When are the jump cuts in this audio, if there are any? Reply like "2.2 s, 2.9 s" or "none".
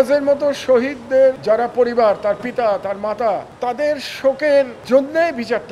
1.4 s, 3.5 s, 4.8 s